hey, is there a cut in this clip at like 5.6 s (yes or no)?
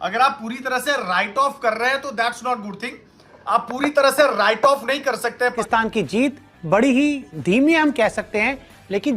yes